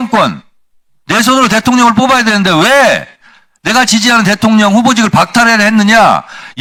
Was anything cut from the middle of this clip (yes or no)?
no